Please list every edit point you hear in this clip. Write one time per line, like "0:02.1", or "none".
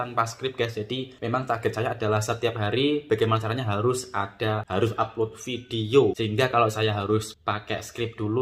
0:01.1
0:04.6
0:06.2
0:07.3